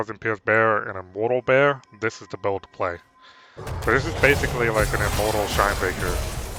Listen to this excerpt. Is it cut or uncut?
uncut